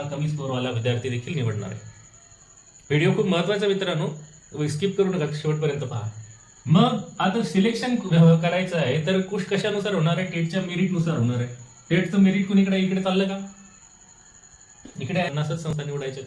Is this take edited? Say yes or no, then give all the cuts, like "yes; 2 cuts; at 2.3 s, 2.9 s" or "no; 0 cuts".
yes; 1 cut; at 15.3 s